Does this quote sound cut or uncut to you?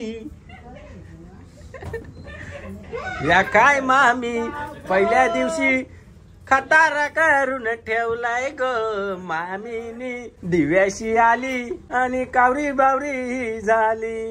cut